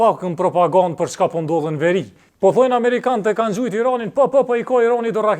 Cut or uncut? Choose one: cut